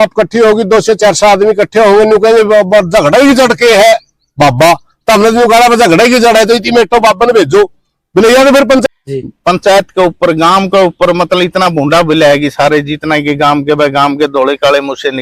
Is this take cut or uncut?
cut